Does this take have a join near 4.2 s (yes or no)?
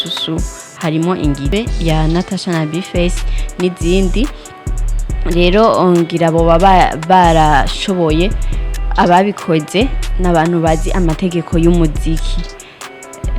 no